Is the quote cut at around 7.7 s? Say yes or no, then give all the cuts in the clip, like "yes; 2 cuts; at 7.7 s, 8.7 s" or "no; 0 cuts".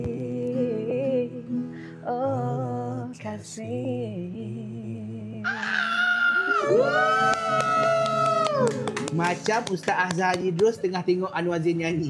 no; 0 cuts